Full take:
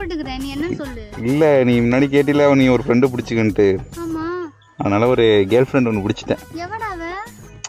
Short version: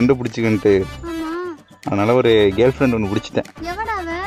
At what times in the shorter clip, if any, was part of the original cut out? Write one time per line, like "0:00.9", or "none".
none